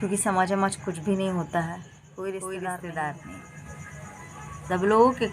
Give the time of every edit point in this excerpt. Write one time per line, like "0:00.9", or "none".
0:02.4